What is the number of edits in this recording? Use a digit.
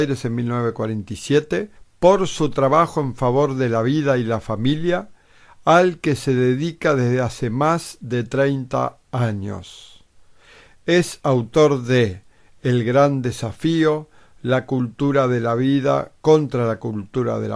0